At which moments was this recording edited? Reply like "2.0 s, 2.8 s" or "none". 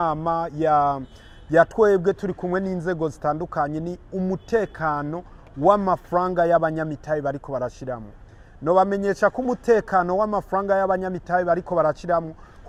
none